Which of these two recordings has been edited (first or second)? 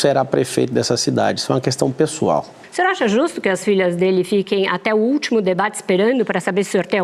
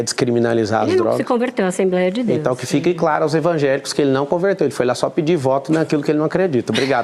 first